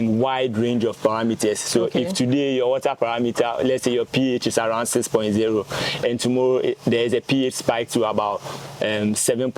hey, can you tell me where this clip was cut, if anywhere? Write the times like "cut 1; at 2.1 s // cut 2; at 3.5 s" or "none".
none